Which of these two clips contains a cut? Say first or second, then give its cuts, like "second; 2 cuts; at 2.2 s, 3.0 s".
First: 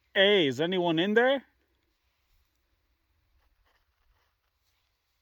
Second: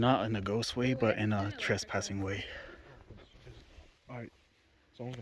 second; 1 cut; at 3.5 s